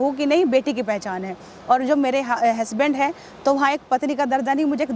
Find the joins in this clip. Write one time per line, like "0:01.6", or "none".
none